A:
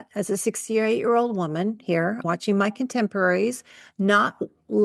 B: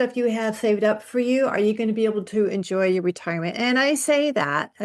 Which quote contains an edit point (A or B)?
A